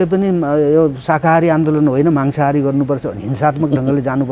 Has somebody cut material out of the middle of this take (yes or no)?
no